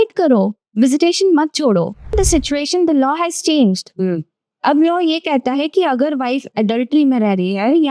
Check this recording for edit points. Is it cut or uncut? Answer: cut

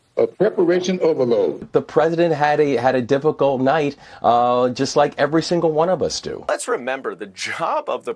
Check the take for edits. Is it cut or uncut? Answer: cut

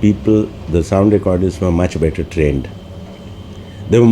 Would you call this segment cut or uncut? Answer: uncut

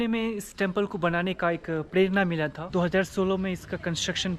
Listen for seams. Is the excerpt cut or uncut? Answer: cut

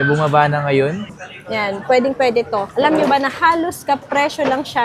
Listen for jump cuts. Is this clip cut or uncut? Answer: cut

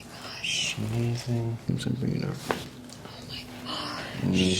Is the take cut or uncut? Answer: cut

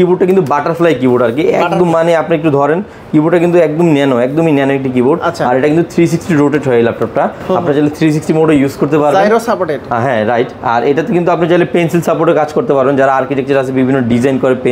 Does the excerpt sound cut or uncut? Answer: uncut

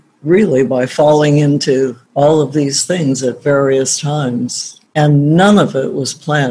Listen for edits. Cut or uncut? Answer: uncut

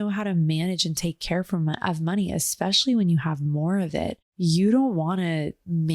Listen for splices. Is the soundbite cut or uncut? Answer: cut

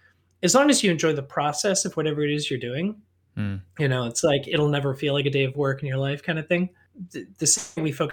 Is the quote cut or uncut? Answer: cut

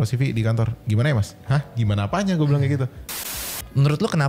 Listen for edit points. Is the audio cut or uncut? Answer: cut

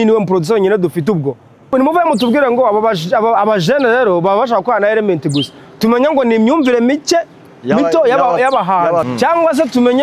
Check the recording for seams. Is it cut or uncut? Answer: cut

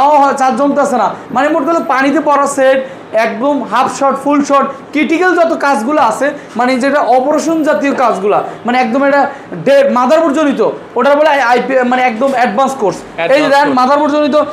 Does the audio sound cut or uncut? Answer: uncut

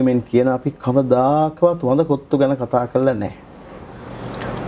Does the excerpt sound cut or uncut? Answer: uncut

